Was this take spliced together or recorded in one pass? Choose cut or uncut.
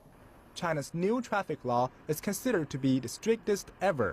uncut